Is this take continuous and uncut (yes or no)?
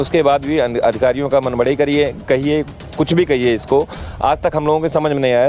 yes